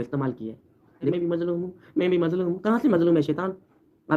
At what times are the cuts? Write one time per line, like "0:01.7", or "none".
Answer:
0:01.1

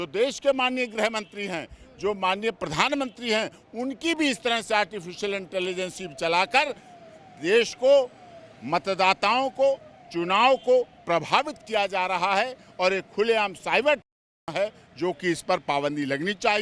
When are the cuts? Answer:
none

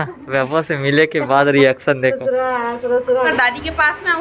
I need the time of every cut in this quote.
0:03.3

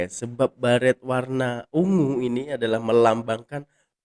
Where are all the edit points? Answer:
none

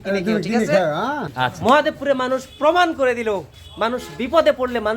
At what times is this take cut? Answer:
0:01.2

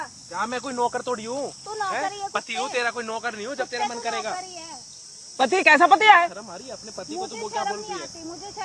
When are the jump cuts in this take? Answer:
none

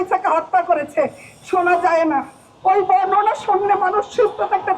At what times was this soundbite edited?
none

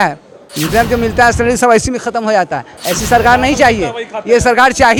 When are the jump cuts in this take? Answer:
none

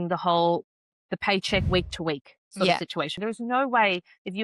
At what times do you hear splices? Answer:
0:03.2

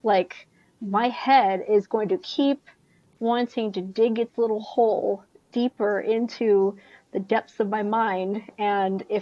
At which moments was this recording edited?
none

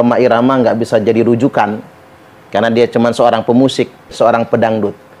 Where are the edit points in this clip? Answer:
0:04.1

